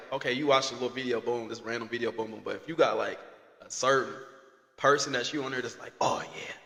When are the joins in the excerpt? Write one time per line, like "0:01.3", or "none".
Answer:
none